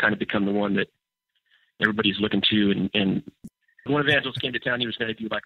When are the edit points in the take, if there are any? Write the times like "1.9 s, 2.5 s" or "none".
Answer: 3.5 s